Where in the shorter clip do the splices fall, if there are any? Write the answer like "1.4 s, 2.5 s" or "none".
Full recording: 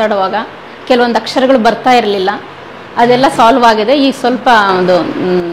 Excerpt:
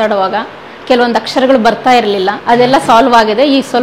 2.4 s